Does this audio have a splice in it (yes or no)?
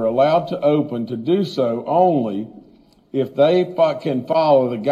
no